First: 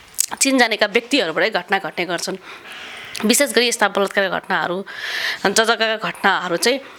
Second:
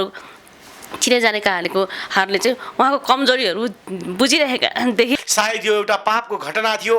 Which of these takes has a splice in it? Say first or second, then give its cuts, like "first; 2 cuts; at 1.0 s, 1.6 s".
second; 1 cut; at 5.2 s